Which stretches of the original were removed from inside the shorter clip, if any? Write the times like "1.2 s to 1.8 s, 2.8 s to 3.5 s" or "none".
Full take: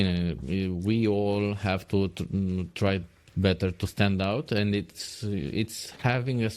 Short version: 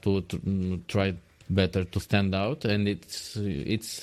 none